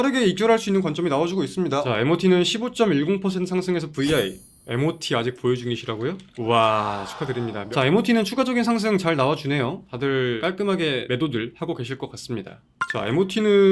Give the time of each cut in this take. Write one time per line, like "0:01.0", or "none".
none